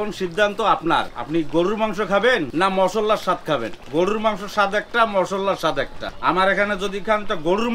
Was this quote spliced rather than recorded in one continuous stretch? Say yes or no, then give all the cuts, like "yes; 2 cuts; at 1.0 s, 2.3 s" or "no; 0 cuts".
yes; 4 cuts; at 1.2 s, 2.5 s, 3.8 s, 6.0 s